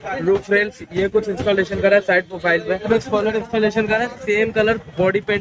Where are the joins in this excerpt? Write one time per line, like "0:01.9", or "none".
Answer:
0:02.9

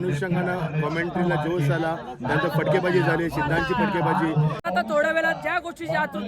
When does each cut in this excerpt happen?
0:04.6

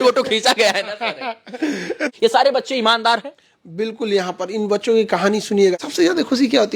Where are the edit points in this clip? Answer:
0:02.1
0:05.8

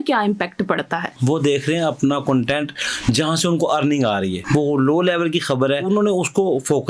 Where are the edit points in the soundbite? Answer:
0:01.2
0:04.4
0:05.9

